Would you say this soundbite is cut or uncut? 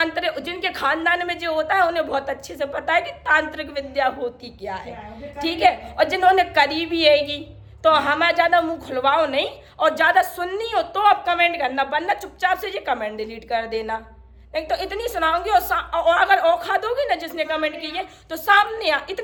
uncut